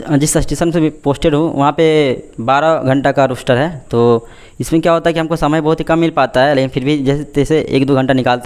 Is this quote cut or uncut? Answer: uncut